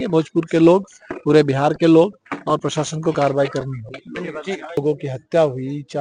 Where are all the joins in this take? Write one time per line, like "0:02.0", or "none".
0:04.8

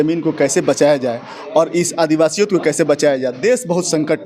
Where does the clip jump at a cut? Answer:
none

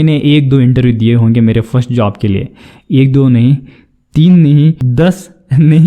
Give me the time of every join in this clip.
0:04.8

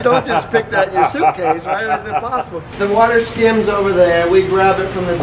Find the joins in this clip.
none

